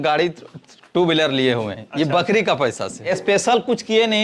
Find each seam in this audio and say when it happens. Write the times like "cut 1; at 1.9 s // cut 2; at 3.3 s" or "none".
cut 1; at 3.0 s